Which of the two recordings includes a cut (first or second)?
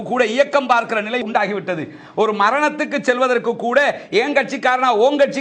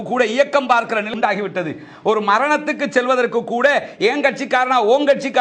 second